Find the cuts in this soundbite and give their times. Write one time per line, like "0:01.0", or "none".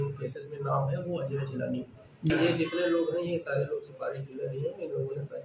0:02.3